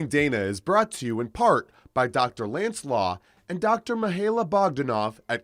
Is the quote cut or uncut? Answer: uncut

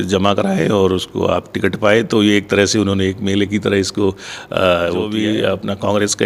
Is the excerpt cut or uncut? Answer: cut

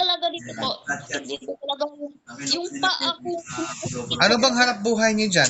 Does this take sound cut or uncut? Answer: uncut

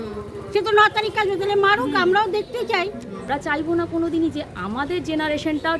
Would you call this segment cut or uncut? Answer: cut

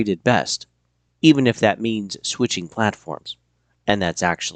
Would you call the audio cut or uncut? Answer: uncut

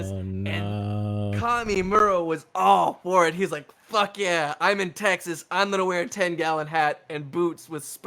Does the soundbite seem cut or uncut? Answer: uncut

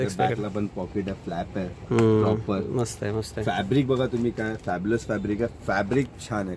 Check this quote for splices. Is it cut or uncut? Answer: uncut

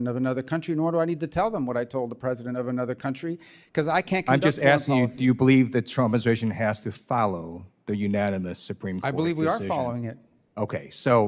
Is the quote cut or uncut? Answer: uncut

